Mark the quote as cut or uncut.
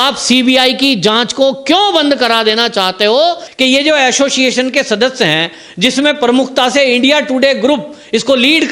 cut